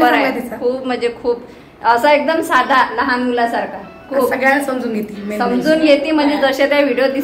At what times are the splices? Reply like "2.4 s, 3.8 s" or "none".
none